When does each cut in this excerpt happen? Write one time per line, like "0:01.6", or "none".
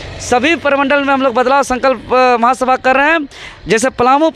none